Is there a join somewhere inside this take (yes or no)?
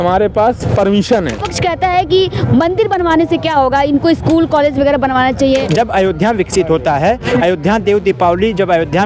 yes